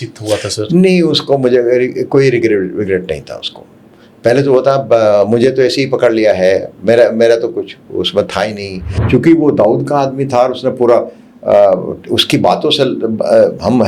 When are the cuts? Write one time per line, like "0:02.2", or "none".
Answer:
0:08.9